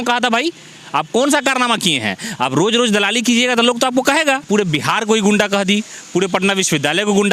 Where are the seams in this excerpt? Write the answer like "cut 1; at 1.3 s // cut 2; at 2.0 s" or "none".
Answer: cut 1; at 4.4 s